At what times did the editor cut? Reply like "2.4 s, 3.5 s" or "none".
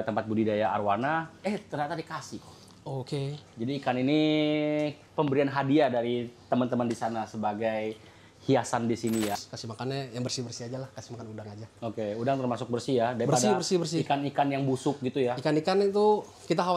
9.3 s